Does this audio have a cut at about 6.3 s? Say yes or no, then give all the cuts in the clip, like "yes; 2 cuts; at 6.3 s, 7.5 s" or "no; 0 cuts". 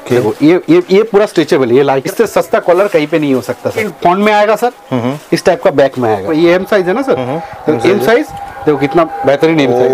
yes; 3 cuts; at 2.1 s, 3.9 s, 6.3 s